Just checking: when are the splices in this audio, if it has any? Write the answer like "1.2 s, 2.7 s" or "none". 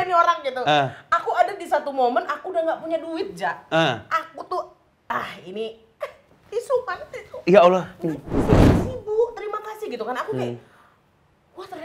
8.7 s